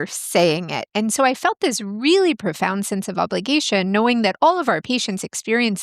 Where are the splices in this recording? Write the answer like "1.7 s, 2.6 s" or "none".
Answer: 4.8 s